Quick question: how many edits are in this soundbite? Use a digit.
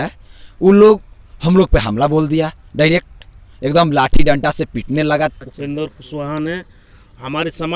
1